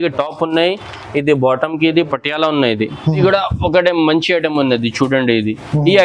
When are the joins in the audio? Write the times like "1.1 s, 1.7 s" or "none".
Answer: 3.2 s